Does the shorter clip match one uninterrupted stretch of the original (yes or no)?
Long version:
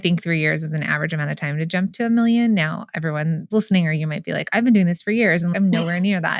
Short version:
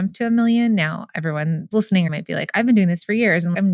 no